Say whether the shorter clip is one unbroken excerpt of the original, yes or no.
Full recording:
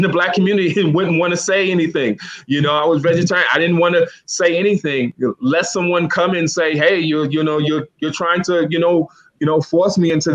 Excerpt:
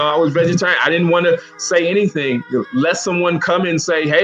yes